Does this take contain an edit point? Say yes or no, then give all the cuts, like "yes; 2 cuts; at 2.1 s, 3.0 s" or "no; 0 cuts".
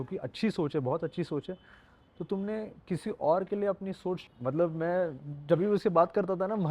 yes; 1 cut; at 4.3 s